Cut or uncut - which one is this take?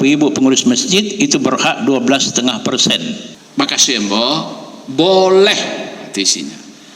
cut